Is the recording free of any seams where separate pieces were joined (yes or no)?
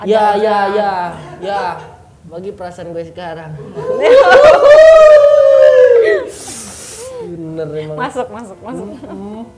yes